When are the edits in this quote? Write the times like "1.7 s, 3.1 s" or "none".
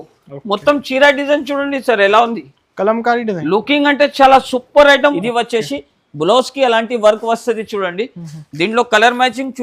5.1 s